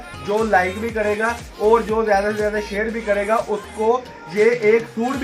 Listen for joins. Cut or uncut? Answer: uncut